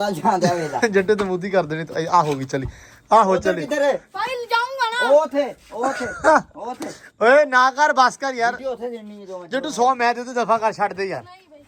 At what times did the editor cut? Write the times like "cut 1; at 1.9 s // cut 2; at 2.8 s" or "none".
none